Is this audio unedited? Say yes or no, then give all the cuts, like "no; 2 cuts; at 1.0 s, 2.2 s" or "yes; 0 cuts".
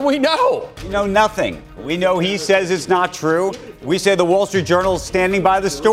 no; 1 cut; at 0.9 s